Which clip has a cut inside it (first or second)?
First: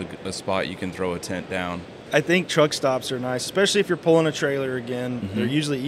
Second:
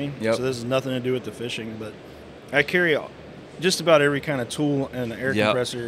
first